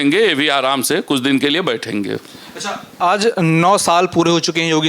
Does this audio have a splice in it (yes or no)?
no